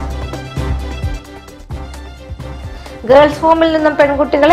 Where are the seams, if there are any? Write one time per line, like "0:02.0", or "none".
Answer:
none